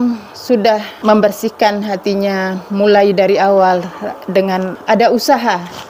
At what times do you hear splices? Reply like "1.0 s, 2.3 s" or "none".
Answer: 0.9 s, 4.7 s